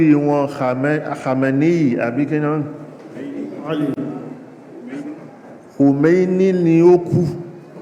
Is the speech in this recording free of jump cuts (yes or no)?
yes